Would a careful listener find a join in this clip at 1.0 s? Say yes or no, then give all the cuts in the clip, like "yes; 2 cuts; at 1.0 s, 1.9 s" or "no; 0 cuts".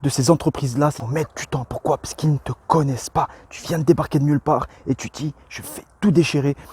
yes; 1 cut; at 1.0 s